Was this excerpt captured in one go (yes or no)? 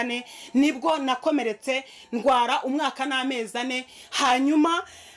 yes